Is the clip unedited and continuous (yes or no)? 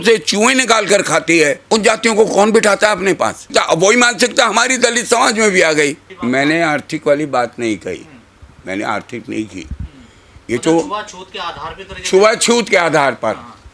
no